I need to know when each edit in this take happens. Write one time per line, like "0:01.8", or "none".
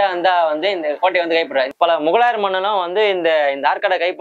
0:01.7